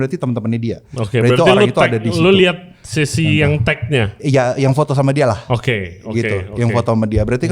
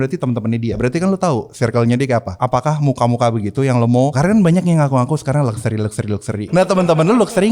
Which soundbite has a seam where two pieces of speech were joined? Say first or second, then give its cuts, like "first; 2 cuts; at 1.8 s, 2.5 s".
second; 4 cuts; at 0.8 s, 2.3 s, 4.1 s, 6.5 s